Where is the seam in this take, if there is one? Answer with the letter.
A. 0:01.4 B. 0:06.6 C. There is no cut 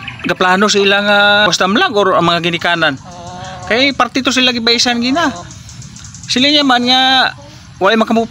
A